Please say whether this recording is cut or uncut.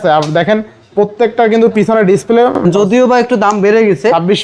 cut